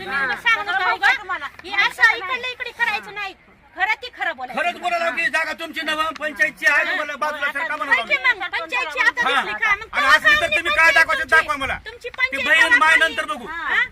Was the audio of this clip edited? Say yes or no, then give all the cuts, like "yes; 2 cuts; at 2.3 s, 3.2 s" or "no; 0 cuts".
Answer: no; 0 cuts